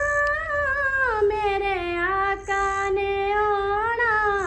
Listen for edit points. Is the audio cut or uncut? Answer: uncut